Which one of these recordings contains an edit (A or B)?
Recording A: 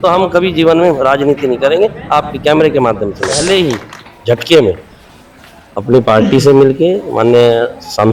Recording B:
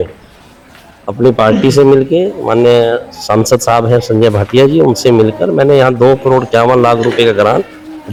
A